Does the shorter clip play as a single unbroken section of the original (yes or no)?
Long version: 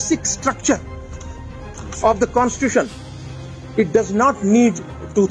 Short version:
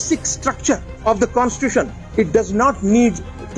no